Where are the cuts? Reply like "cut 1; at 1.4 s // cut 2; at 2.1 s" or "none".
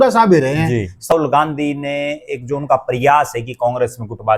cut 1; at 1.1 s